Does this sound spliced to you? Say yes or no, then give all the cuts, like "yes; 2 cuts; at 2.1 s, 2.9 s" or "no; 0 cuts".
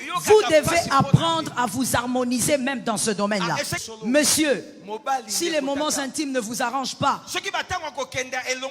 yes; 1 cut; at 3.9 s